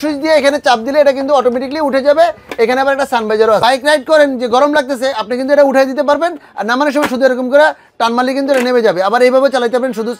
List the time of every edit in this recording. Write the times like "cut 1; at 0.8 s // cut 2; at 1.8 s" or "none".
cut 1; at 3.6 s